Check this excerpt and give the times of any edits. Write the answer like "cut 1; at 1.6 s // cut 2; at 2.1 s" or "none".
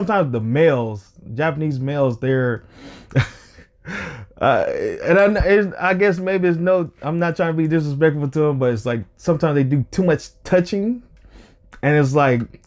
none